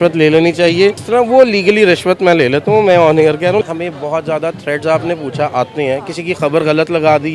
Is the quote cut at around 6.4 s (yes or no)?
no